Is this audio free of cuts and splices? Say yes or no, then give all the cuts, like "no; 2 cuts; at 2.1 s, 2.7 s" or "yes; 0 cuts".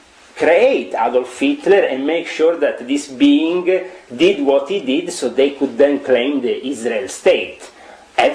yes; 0 cuts